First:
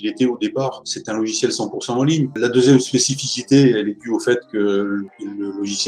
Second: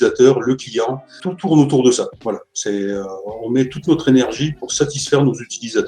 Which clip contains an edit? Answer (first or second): first